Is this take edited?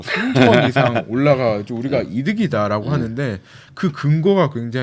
no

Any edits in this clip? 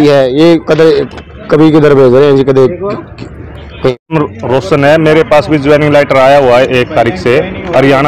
yes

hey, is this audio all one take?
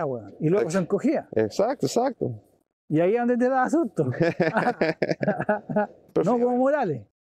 no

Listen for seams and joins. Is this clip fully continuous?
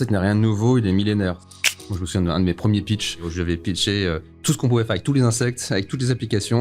no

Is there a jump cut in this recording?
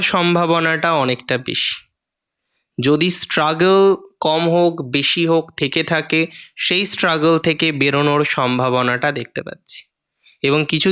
no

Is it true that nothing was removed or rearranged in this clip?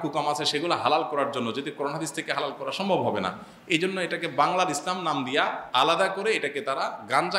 yes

